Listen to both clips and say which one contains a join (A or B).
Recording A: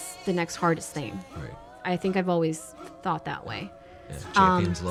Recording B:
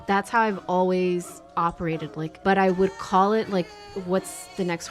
B